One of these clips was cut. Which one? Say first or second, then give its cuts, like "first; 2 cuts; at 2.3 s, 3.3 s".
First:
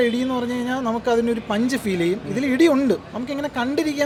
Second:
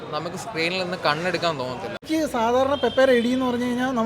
second; 1 cut; at 2.0 s